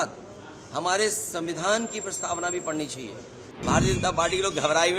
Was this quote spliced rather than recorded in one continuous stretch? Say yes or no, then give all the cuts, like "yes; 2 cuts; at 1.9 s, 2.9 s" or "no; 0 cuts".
yes; 1 cut; at 3.5 s